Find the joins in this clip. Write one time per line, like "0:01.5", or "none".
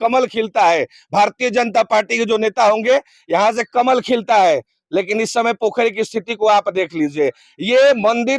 none